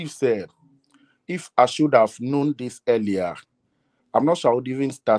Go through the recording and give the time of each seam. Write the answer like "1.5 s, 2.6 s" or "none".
none